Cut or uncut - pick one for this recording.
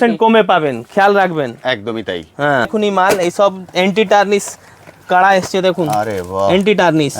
cut